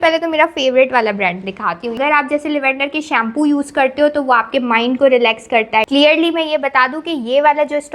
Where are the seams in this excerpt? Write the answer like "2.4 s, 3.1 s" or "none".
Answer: 2.0 s, 5.9 s